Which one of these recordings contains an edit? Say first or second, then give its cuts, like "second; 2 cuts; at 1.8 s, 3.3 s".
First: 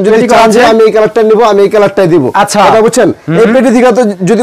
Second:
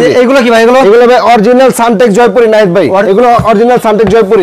second; 1 cut; at 3.0 s